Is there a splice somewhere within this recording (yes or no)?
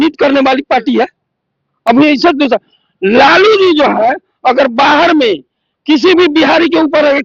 no